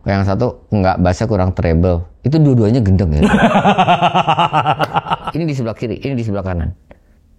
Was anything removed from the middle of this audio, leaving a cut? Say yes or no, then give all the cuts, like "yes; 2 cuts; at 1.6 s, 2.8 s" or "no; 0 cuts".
yes; 1 cut; at 5.3 s